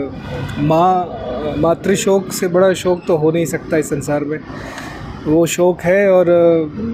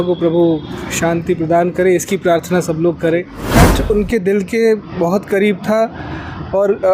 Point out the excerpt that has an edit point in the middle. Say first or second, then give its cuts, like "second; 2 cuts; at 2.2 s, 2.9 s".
second; 1 cut; at 3.4 s